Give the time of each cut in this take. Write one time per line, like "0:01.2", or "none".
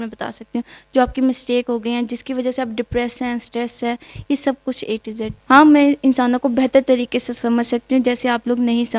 0:05.3